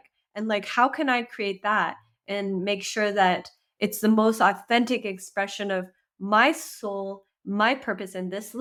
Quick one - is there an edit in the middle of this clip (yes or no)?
no